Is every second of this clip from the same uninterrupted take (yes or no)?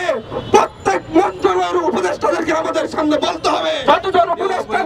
no